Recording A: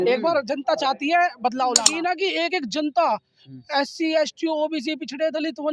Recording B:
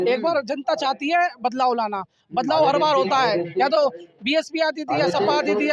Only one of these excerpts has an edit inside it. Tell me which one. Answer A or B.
A